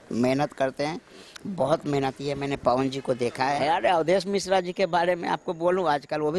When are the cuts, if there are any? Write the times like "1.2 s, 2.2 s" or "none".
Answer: 3.6 s